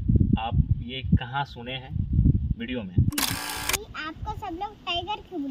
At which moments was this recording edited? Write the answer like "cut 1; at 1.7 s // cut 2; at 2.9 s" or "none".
cut 1; at 3.5 s